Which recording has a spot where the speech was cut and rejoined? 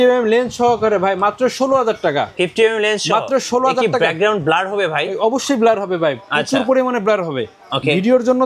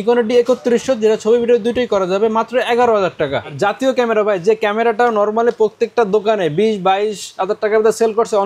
second; 1 cut; at 3.5 s

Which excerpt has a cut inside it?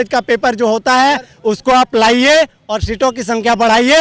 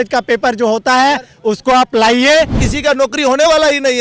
second; 1 cut; at 2.6 s

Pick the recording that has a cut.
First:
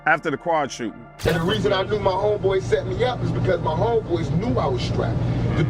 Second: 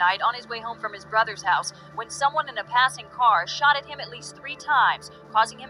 first; 1 cut; at 1.1 s

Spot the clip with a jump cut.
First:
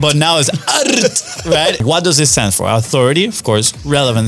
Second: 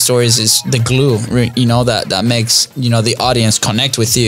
first; 1 cut; at 1.8 s

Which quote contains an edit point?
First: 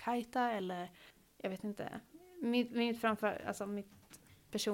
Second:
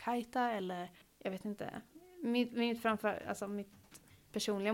second; 1 cut; at 1.0 s

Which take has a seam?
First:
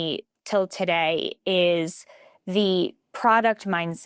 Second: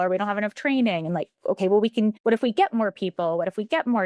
second; 1 cut; at 2.2 s

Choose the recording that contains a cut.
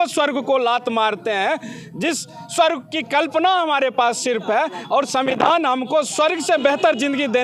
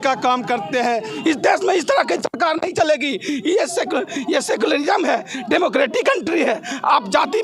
second; 1 cut; at 1.1 s

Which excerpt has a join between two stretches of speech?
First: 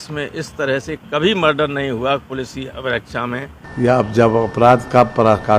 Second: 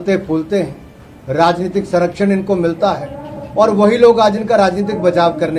first; 1 cut; at 3.6 s

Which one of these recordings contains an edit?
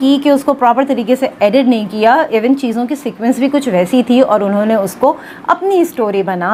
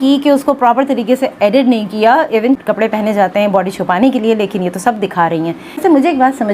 second; 2 cuts; at 2.6 s, 5.7 s

